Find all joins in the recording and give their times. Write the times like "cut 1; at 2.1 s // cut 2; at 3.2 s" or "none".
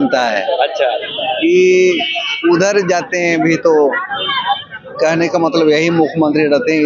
none